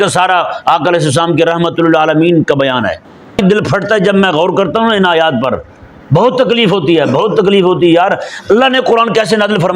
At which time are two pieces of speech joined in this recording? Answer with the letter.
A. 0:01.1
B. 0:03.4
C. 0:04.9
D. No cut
B